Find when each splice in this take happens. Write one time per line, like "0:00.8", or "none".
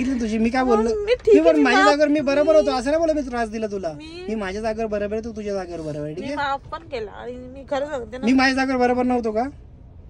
none